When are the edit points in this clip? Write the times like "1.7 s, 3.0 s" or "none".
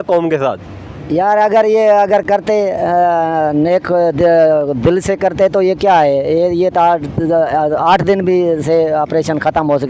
none